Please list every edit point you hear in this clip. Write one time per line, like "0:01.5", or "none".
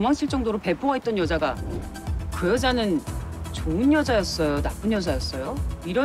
0:01.6